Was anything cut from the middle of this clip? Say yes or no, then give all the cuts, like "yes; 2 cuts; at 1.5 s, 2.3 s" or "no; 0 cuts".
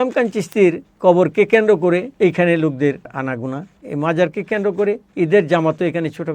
yes; 4 cuts; at 0.9 s, 2.1 s, 3.4 s, 5.1 s